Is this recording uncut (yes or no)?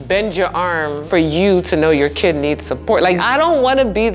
no